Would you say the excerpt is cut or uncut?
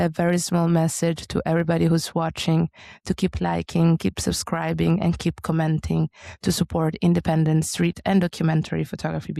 uncut